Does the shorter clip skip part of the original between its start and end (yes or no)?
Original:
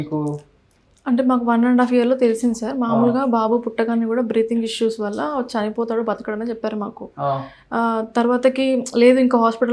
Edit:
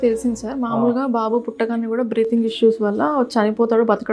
no